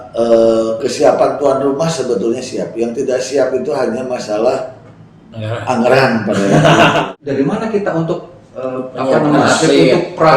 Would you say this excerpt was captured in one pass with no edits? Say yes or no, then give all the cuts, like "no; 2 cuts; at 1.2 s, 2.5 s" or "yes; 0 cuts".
no; 1 cut; at 7.0 s